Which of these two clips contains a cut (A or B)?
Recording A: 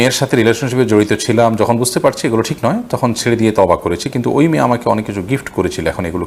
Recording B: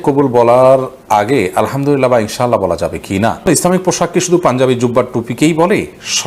B